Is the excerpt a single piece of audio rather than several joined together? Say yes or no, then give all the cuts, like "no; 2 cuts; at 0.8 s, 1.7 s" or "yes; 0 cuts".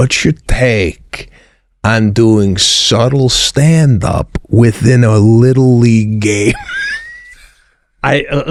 yes; 0 cuts